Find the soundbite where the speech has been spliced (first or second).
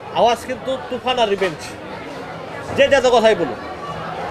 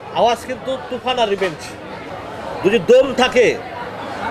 second